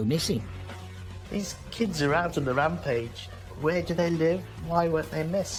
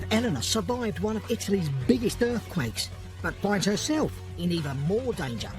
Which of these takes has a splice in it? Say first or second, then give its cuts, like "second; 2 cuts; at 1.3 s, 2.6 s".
second; 1 cut; at 3.1 s